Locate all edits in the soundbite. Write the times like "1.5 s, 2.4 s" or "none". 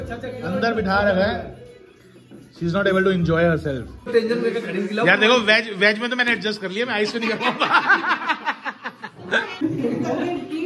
4.1 s, 9.5 s